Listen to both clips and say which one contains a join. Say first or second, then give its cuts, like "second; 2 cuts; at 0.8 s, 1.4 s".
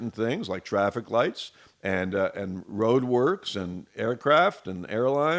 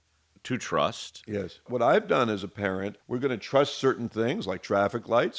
second; 2 cuts; at 1.7 s, 3.0 s